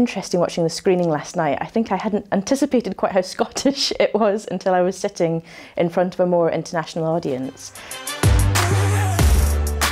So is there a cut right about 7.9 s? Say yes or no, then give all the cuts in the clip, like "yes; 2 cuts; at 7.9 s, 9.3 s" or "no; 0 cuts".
yes; 1 cut; at 7.9 s